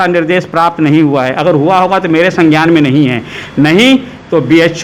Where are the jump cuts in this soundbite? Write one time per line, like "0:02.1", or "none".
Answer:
none

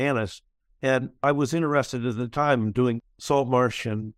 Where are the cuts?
none

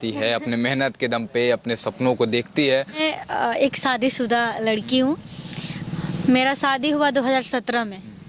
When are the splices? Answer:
0:03.0

